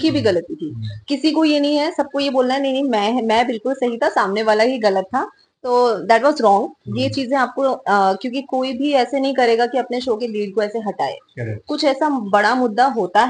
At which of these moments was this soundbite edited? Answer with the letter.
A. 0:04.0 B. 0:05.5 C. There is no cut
C